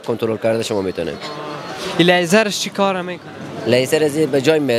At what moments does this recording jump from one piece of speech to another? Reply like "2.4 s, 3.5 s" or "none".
none